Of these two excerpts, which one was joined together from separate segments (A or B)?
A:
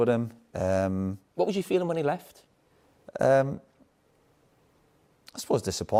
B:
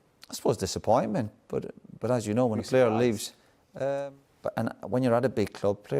B